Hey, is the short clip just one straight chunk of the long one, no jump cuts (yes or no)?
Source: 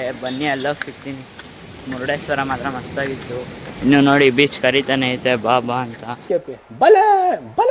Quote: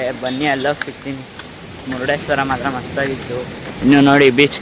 yes